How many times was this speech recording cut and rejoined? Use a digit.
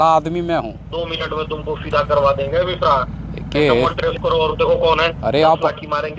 2